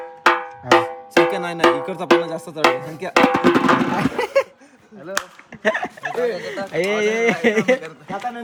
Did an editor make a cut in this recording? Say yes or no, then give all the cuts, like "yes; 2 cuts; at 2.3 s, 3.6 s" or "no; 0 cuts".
no; 0 cuts